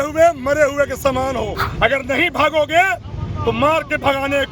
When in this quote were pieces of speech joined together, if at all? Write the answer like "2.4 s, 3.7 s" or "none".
1.6 s